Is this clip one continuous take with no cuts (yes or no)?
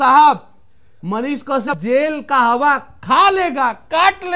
no